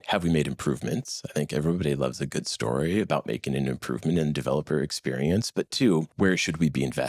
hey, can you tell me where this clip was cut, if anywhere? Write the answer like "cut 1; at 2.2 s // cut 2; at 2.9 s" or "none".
cut 1; at 6.1 s